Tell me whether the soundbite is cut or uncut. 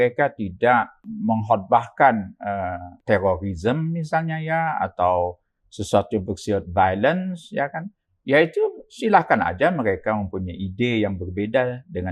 cut